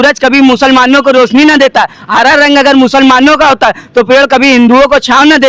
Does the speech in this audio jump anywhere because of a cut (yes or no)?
no